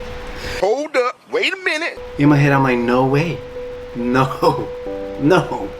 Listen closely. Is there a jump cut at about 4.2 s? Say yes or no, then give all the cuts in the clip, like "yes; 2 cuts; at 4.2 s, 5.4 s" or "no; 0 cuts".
no; 1 cut; at 1.8 s